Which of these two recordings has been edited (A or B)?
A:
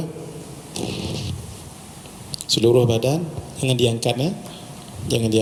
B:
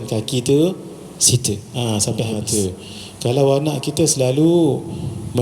B